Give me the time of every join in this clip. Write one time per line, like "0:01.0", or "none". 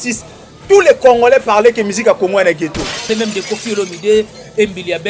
0:03.1